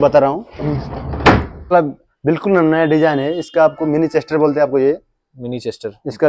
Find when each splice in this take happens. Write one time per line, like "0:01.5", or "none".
0:01.7